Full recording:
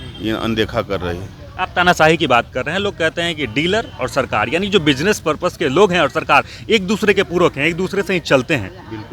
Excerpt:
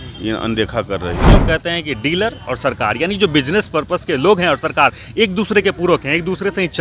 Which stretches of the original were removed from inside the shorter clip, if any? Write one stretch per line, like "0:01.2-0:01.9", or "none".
0:01.3-0:02.8